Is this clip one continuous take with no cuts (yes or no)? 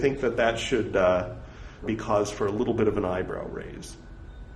no